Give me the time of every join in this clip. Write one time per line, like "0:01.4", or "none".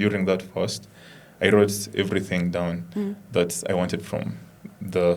none